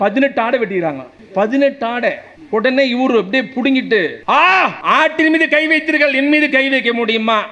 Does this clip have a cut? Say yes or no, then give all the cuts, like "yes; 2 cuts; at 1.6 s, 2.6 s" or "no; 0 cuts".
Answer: yes; 4 cuts; at 1.1 s, 2.3 s, 4.2 s, 4.8 s